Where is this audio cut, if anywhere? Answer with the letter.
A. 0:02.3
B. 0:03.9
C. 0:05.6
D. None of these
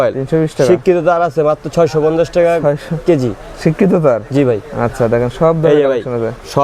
D